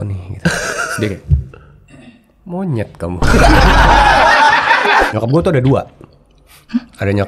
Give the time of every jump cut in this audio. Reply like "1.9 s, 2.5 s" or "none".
5.1 s